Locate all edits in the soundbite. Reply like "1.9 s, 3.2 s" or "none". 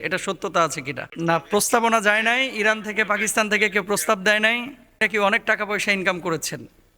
1.1 s, 4.9 s